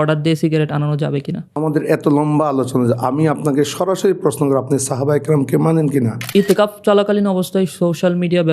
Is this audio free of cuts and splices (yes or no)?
no